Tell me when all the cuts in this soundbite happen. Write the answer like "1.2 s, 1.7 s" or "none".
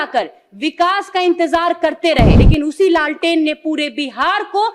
2.4 s